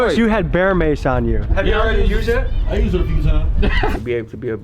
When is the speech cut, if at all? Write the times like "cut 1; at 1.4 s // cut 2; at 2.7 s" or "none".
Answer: cut 1; at 1.3 s // cut 2; at 3.9 s